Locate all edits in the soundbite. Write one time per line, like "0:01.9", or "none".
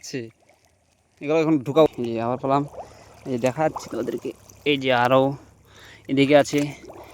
0:01.9